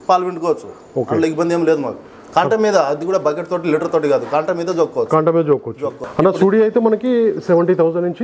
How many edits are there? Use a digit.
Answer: 1